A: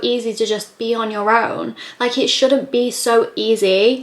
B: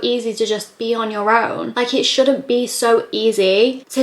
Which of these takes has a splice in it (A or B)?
B